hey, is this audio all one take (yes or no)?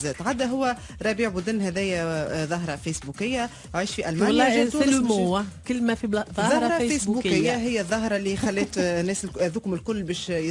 yes